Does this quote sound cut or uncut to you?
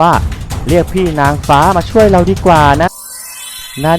cut